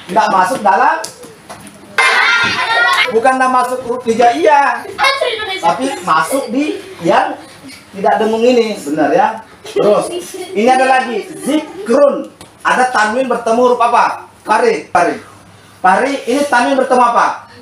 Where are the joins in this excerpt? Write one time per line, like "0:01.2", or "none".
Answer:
0:02.0
0:03.1
0:14.9